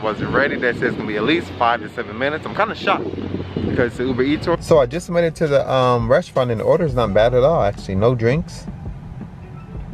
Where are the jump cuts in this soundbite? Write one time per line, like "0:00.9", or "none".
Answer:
0:04.6